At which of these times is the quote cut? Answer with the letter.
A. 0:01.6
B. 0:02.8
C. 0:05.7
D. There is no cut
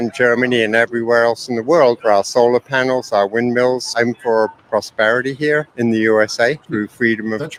D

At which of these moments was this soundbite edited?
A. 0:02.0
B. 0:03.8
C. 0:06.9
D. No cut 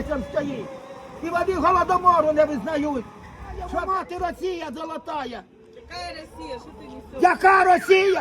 B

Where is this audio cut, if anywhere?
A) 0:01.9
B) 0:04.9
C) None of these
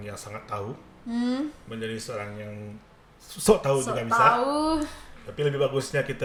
C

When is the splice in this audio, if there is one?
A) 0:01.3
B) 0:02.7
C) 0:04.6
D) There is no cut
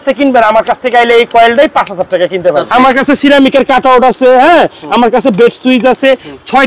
B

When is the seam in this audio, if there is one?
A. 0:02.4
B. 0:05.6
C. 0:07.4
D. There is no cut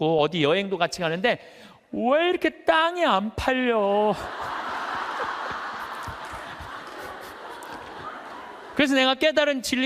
D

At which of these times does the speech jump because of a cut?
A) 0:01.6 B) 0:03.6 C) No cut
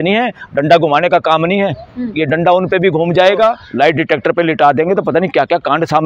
B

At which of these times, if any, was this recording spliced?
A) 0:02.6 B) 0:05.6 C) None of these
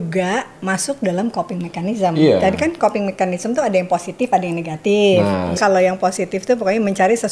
B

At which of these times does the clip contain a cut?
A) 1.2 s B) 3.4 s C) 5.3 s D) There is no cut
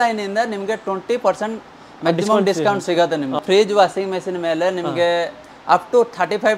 B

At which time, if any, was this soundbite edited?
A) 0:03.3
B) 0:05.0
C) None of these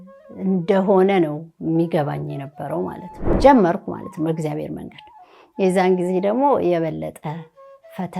A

